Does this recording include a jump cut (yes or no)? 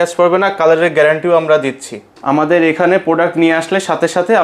yes